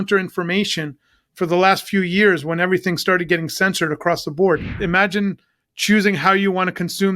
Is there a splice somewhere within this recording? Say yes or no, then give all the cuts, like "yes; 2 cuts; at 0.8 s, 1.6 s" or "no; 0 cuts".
yes; 1 cut; at 4.7 s